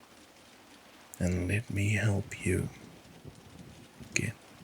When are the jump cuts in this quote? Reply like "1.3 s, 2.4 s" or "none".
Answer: 1.2 s